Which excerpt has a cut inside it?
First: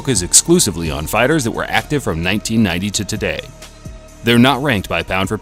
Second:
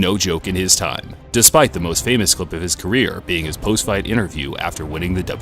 second; 1 cut; at 3.2 s

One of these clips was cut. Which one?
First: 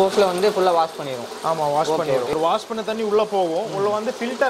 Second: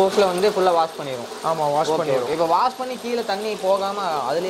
first; 1 cut; at 2.4 s

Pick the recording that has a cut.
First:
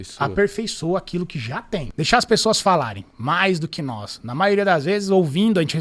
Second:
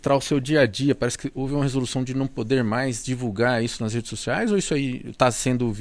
first; 1 cut; at 1.9 s

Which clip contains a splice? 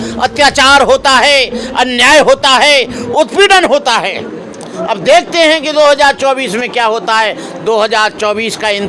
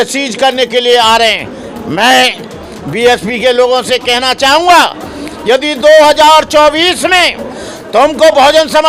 first; 1 cut; at 4.7 s

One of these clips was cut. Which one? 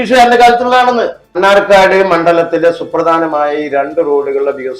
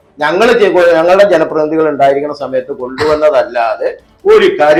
first; 1 cut; at 1.3 s

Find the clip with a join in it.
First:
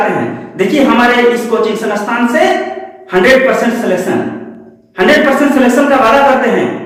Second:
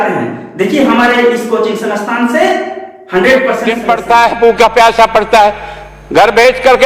second; 1 cut; at 3.7 s

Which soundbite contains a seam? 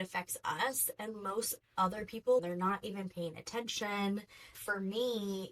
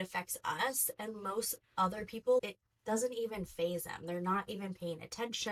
first; 2 cuts; at 2.4 s, 4.6 s

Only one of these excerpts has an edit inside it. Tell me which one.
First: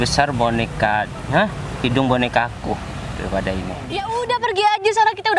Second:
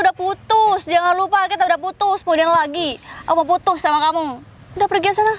first; 1 cut; at 4.0 s

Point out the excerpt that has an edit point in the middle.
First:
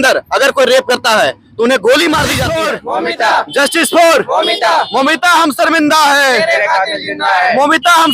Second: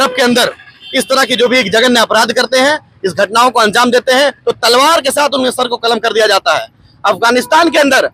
first; 1 cut; at 2.5 s

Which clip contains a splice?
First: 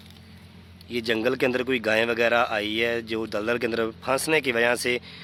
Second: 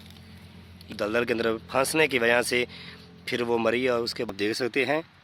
second; 2 cuts; at 0.9 s, 4.3 s

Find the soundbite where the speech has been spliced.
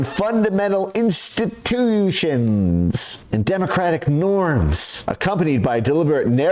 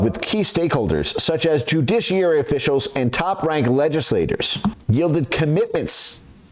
first; 2 cuts; at 3.1 s, 4.9 s

